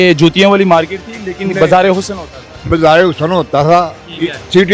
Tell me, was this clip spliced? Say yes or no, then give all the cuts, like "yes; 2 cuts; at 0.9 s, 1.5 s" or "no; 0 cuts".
no; 0 cuts